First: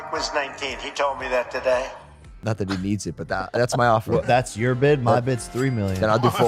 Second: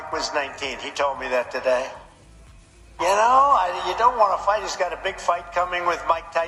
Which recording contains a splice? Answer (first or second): first